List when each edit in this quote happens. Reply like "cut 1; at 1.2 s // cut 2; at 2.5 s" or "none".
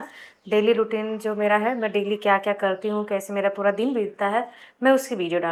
none